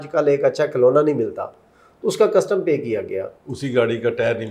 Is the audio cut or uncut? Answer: uncut